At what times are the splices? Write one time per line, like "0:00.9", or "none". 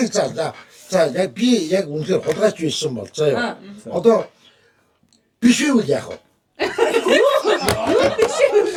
none